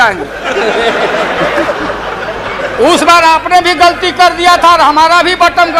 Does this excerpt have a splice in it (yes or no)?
no